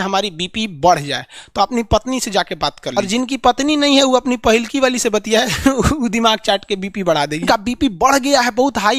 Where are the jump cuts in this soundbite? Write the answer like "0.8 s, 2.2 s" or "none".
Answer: 3.0 s, 7.4 s